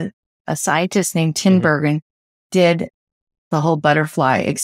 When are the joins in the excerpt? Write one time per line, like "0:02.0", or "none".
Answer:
0:03.5